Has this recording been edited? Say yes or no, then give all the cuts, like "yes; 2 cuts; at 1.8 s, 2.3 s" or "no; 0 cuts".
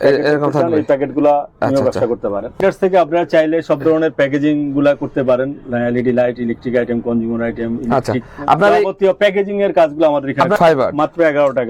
yes; 2 cuts; at 2.5 s, 10.6 s